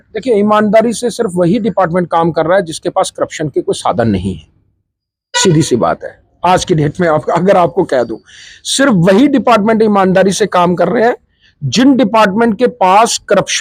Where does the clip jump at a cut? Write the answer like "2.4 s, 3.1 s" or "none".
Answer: none